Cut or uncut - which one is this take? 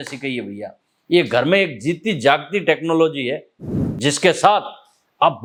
uncut